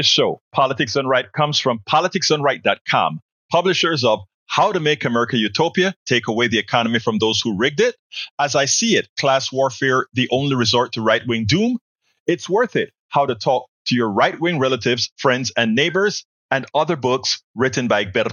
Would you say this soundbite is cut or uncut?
uncut